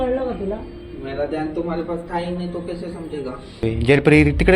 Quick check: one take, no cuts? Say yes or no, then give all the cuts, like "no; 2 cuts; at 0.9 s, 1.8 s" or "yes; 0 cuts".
no; 1 cut; at 3.6 s